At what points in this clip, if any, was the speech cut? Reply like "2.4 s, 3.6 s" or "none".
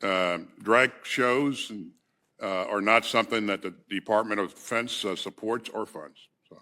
none